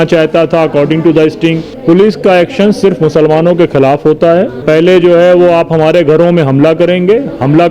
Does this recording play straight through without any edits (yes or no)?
no